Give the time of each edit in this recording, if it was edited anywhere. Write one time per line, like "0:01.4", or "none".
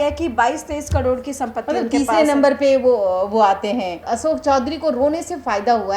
0:04.0